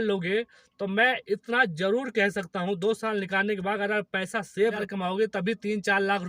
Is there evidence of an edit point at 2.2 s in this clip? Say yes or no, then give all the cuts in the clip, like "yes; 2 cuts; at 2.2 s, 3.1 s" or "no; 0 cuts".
no; 1 cut; at 4.8 s